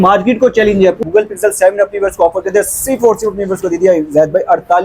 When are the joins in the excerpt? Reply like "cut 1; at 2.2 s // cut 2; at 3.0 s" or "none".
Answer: cut 1; at 1.0 s